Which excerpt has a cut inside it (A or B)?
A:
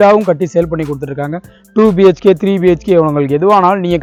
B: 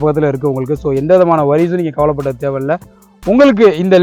B